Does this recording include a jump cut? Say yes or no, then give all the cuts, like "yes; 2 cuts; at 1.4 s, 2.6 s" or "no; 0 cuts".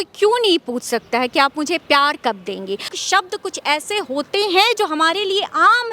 yes; 1 cut; at 2.9 s